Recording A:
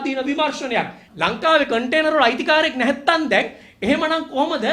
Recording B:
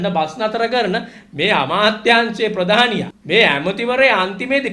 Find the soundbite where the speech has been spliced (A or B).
A